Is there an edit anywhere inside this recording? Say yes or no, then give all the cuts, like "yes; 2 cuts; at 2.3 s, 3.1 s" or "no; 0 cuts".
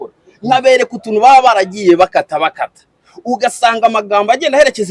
no; 0 cuts